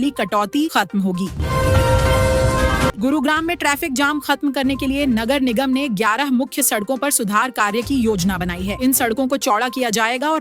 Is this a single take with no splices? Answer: no; 2 cuts; at 1.4 s, 3.0 s

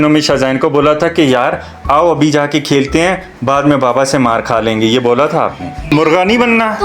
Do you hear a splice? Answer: yes; 1 cut; at 5.8 s

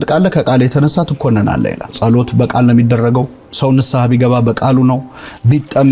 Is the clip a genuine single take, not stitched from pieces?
no; 2 cuts; at 1.9 s, 3.5 s

